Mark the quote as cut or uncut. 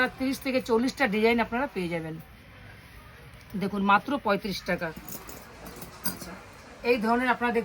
uncut